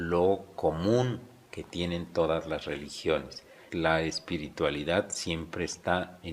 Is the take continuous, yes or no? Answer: no